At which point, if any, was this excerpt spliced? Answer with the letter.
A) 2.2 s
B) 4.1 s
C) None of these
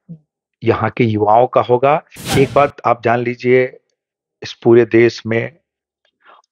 A